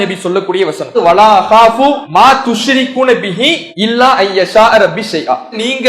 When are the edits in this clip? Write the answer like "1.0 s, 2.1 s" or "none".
1.0 s, 2.0 s, 3.7 s